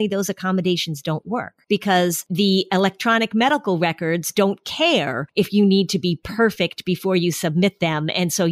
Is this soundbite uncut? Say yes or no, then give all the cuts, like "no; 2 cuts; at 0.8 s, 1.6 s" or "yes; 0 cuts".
no; 3 cuts; at 1.5 s, 2.3 s, 5.2 s